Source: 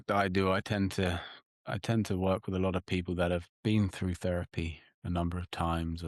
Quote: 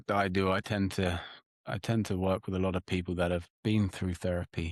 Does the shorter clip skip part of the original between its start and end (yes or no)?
no